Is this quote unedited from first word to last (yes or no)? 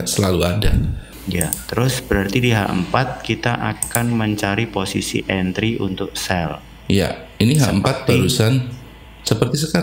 no